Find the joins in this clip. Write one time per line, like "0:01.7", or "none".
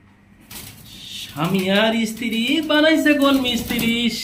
none